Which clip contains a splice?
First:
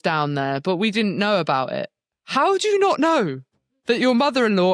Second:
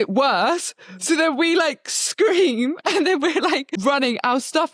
second; 1 cut; at 3.7 s

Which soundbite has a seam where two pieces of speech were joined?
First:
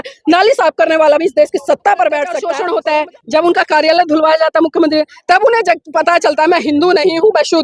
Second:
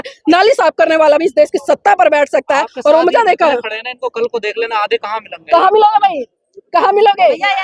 first; 1 cut; at 2.5 s

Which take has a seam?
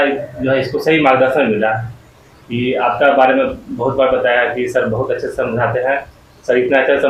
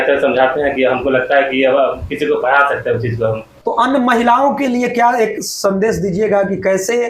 second; 1 cut; at 3.5 s

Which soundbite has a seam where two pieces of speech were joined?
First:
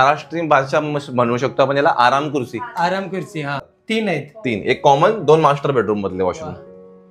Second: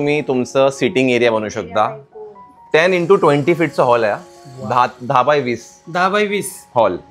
first; 1 cut; at 3.7 s

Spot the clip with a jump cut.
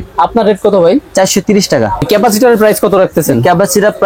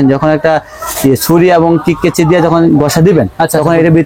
first; 1 cut; at 2.0 s

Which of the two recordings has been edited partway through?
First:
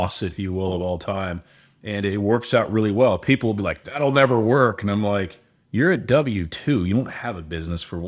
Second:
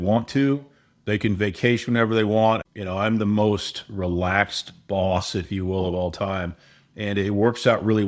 second; 1 cut; at 2.7 s

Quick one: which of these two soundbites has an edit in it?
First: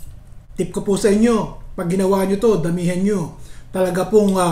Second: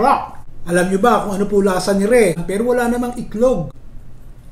second; 1 cut; at 2.4 s

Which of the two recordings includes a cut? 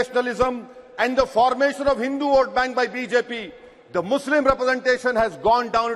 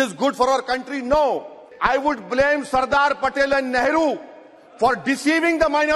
second; 1 cut; at 1.6 s

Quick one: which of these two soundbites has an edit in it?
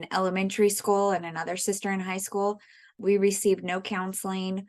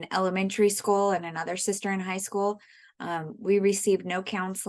first; 1 cut; at 2.9 s

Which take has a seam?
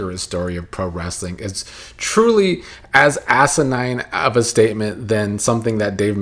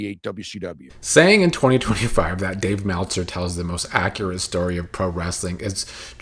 second; 1 cut; at 1.0 s

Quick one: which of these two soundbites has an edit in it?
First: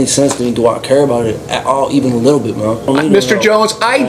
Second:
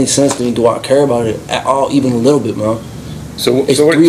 first; 1 cut; at 2.9 s

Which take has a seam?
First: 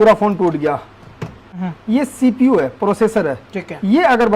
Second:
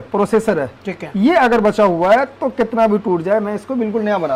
first; 1 cut; at 1.5 s

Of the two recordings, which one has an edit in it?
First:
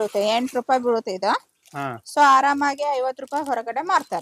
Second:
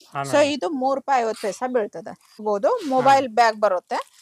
second; 1 cut; at 2.3 s

